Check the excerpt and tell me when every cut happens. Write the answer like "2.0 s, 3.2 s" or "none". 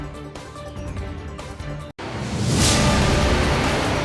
1.1 s, 1.9 s